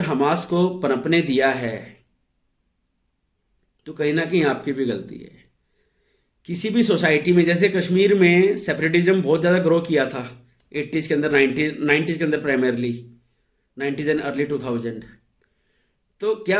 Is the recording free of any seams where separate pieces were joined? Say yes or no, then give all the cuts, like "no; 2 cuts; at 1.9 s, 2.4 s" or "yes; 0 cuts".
yes; 0 cuts